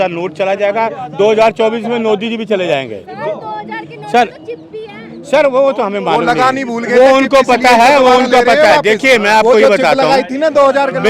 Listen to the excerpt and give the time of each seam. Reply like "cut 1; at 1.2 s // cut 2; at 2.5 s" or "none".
none